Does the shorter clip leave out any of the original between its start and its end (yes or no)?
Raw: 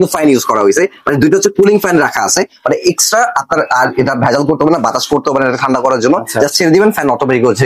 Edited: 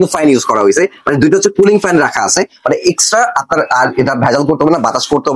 no